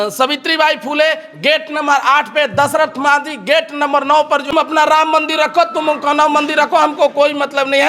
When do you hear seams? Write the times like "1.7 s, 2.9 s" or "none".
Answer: 4.5 s